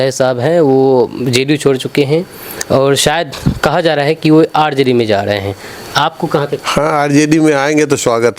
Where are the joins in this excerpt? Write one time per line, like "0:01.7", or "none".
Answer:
0:06.5

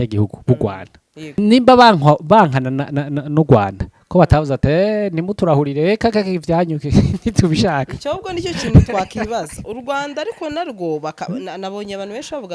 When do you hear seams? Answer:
0:01.4

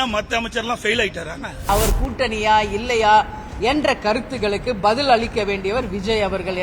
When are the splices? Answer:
0:01.7

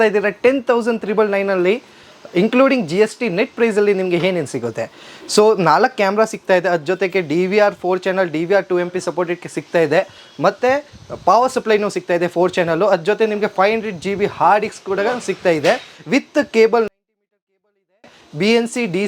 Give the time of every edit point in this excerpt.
none

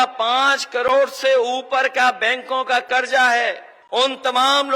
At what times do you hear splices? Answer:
0:03.7

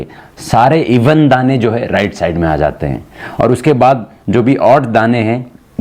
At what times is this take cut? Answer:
none

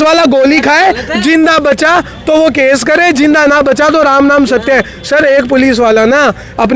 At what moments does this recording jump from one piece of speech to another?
none

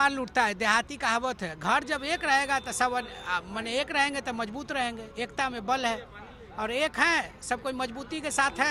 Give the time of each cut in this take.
none

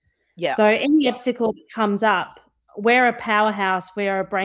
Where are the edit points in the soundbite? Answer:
none

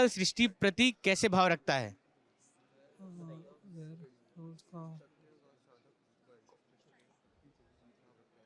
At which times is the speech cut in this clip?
none

